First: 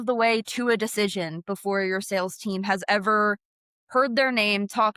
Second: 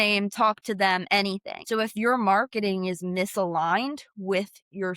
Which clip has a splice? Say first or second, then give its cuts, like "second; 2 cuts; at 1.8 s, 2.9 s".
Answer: second; 1 cut; at 1.5 s